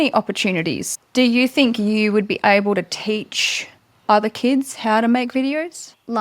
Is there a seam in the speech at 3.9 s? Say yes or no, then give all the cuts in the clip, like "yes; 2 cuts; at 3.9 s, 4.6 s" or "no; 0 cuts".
no; 1 cut; at 0.9 s